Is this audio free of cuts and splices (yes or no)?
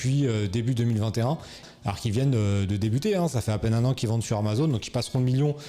no